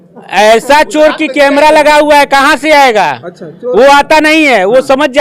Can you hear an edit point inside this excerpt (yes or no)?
no